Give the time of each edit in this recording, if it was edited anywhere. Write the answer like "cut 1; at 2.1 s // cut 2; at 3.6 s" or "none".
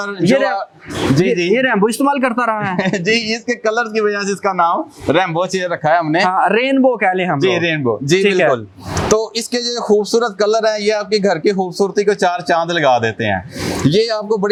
none